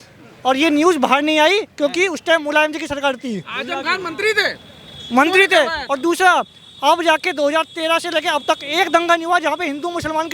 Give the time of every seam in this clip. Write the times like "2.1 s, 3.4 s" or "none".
none